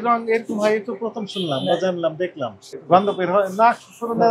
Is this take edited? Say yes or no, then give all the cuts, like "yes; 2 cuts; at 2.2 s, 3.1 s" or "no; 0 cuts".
yes; 1 cut; at 2.6 s